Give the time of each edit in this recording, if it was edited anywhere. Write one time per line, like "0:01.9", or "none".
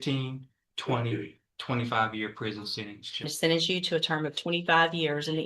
0:03.3